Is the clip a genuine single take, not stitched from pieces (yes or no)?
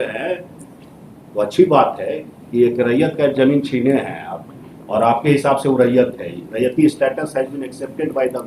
yes